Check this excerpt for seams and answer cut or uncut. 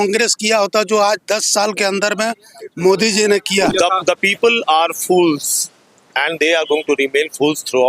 cut